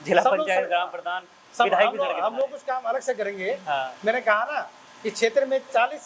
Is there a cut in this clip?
no; 0 cuts

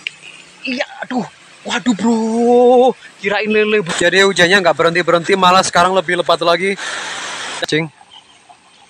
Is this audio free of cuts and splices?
no; 2 cuts; at 3.8 s, 7.6 s

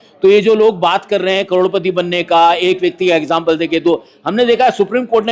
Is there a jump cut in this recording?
no; 0 cuts

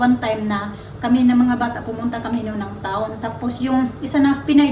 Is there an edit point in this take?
no; 0 cuts

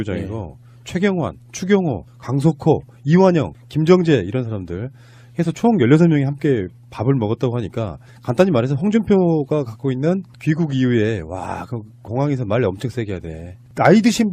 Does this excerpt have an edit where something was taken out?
yes; 1 cut; at 11.3 s

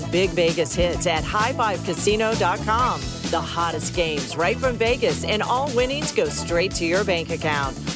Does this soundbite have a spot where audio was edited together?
no; 0 cuts

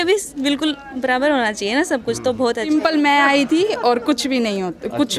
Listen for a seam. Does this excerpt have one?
yes; 1 cut; at 2.7 s

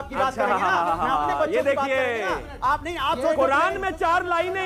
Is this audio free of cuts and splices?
yes; 0 cuts

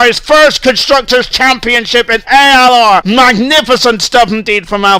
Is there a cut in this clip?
yes; 1 cut; at 3.0 s

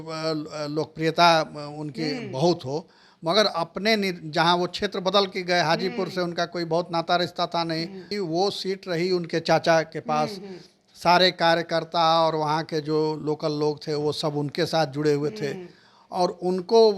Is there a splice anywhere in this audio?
yes; 1 cut; at 8.1 s

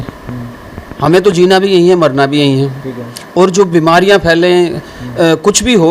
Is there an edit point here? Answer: no; 0 cuts

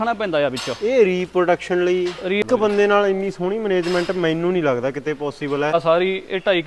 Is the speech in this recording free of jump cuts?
no; 2 cuts; at 2.4 s, 5.7 s

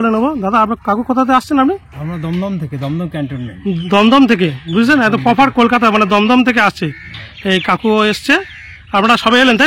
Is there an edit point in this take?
no; 0 cuts

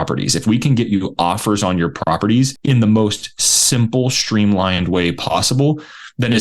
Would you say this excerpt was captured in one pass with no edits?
no; 1 cut; at 2.6 s

